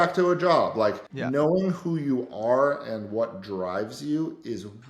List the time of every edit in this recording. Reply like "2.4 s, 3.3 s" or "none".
1.1 s